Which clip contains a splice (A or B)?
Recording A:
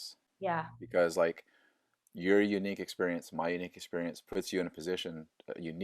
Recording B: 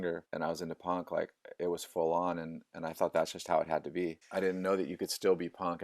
B